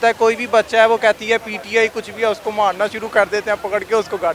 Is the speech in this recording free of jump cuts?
yes; 0 cuts

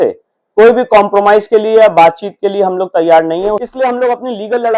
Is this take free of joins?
no; 1 cut; at 3.6 s

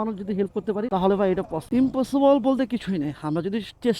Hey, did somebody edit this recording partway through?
yes; 1 cut; at 1.6 s

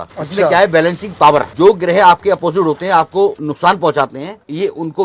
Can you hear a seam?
no; 0 cuts

